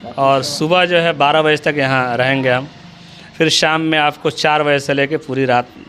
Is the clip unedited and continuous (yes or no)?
yes